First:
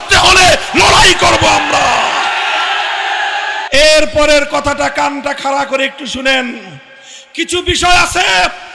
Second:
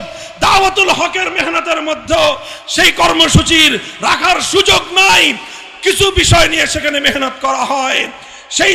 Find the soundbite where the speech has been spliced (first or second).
first